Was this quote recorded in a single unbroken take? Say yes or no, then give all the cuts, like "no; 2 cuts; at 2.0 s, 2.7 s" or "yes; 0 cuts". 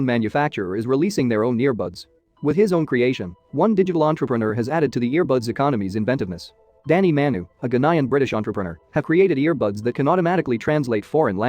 yes; 0 cuts